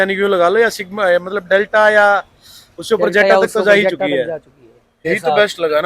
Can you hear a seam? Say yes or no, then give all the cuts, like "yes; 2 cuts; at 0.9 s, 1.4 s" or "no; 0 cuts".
yes; 1 cut; at 4.9 s